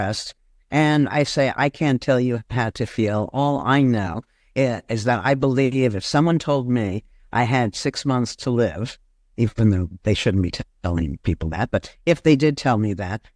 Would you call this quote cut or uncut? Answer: uncut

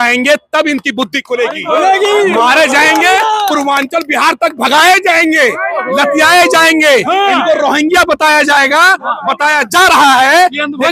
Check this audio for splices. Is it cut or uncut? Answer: uncut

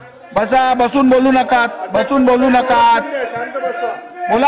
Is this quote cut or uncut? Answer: uncut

